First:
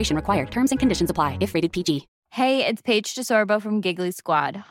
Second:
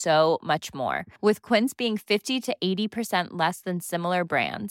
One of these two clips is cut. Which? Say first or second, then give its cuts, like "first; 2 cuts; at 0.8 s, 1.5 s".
first; 1 cut; at 2.2 s